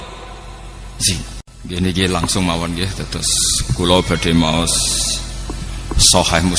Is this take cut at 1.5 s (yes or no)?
yes